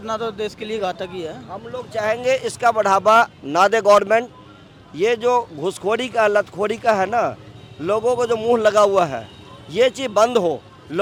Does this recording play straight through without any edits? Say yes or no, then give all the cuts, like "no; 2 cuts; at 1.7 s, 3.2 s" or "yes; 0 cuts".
yes; 0 cuts